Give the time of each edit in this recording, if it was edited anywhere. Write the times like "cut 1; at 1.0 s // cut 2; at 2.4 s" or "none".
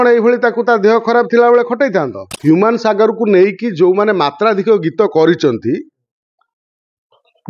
cut 1; at 2.3 s